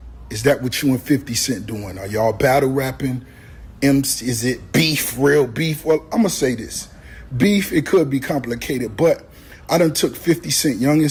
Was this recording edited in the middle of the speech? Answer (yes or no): no